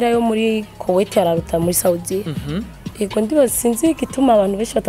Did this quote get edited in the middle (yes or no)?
no